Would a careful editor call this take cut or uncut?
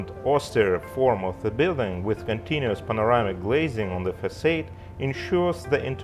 uncut